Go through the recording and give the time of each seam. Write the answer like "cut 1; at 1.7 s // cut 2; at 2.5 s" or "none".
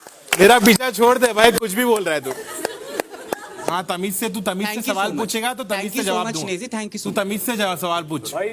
cut 1; at 3.7 s